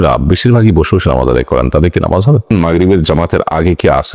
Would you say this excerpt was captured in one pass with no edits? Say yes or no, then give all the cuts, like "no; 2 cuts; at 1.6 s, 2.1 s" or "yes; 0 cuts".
no; 1 cut; at 2.5 s